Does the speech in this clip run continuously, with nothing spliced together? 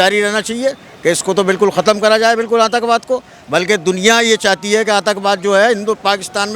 yes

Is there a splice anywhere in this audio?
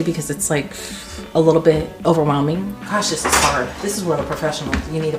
yes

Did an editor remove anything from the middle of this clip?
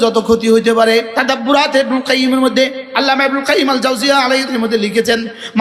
yes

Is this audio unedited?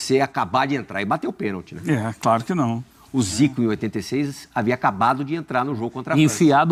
yes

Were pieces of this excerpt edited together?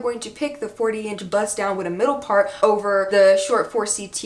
no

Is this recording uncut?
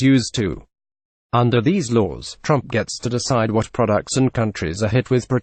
yes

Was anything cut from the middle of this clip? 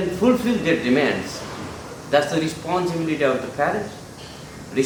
no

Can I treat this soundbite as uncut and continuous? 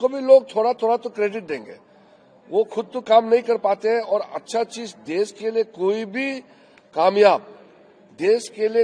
yes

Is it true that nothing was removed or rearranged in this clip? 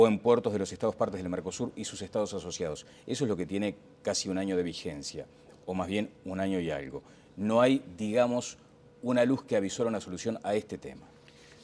yes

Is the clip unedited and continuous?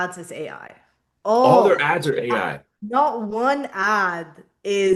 yes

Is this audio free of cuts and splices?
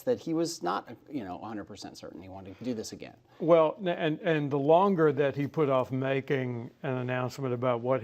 no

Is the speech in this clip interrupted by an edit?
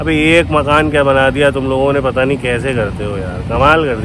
no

